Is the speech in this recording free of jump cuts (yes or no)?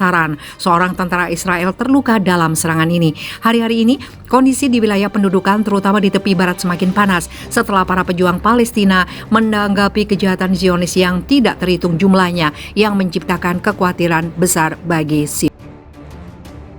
no